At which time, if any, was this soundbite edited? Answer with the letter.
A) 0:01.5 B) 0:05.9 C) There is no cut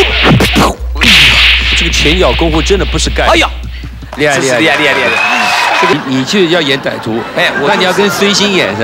B